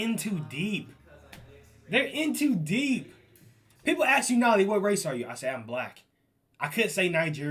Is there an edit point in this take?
no; 0 cuts

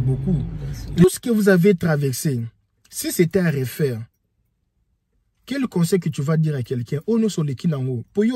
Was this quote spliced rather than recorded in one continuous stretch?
yes; 1 cut; at 1.0 s

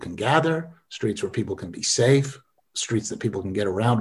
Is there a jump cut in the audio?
no; 0 cuts

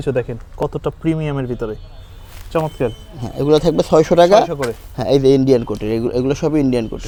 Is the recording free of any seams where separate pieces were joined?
yes; 0 cuts

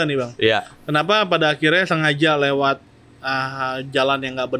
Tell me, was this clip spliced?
no; 0 cuts

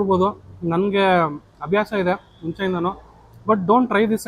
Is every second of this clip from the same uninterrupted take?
yes; 0 cuts

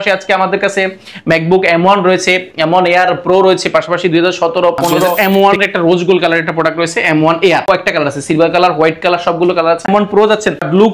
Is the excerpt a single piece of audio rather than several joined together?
no; 3 cuts; at 5.1 s, 7.6 s, 9.9 s

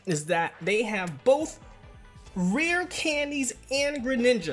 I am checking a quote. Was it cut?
no; 0 cuts

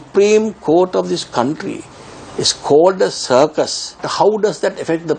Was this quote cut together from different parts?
yes; 1 cut; at 4.1 s

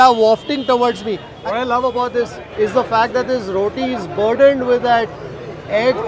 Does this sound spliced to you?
yes; 1 cut; at 1.3 s

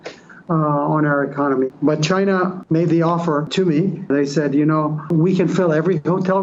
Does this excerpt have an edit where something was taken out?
yes; 4 cuts; at 1.7 s, 2.6 s, 4.0 s, 5.1 s

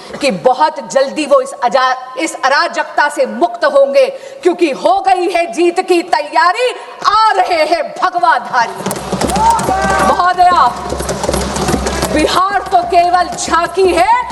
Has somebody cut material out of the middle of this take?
no; 0 cuts

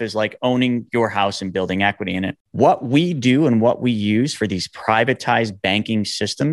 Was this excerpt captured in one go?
no; 1 cut; at 2.4 s

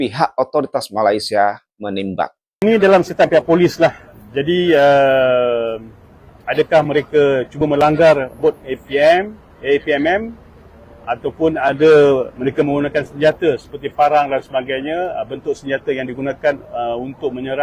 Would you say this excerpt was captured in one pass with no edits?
no; 1 cut; at 2.6 s

